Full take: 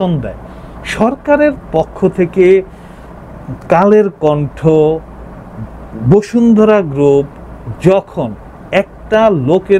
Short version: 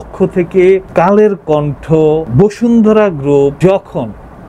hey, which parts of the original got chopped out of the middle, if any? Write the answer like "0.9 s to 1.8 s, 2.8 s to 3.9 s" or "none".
2.7 s to 3.6 s, 5.0 s to 6.0 s, 7.3 s to 7.8 s